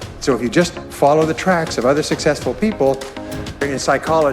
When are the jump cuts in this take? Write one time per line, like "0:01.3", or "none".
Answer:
0:03.1